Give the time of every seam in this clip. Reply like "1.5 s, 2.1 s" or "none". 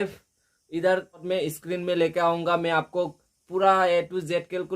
1.2 s